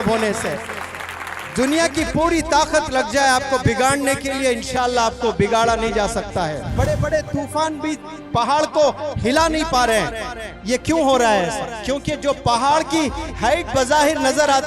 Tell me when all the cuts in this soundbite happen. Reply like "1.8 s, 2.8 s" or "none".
6.7 s